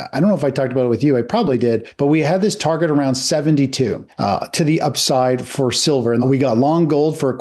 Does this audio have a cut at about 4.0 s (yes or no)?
no